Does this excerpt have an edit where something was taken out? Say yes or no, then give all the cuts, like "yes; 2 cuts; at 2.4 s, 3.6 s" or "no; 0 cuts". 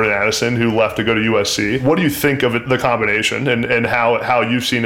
yes; 1 cut; at 1.8 s